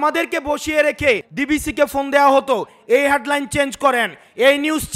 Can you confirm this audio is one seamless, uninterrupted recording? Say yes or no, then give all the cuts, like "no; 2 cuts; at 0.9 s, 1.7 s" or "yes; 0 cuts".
no; 1 cut; at 1.3 s